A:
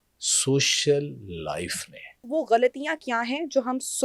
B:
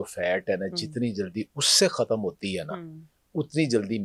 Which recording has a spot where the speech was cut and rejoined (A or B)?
A